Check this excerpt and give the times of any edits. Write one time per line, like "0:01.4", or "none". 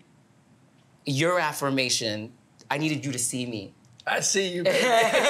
none